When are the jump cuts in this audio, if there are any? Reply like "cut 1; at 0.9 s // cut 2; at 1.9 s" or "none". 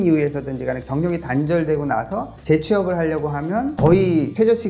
cut 1; at 3.7 s